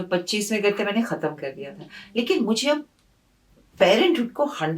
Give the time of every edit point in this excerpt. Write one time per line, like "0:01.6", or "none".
none